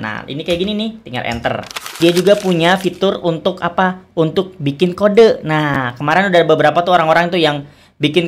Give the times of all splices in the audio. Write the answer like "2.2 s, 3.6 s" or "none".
2.0 s